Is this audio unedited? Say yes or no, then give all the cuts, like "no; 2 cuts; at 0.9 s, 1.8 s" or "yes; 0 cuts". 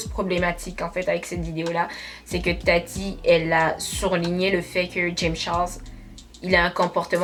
yes; 0 cuts